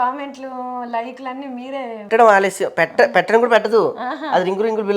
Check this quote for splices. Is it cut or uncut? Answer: cut